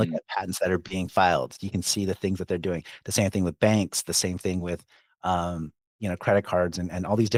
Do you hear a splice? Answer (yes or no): no